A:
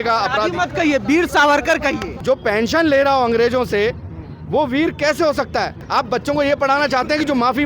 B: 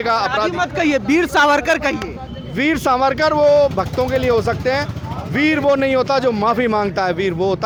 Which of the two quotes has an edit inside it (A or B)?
A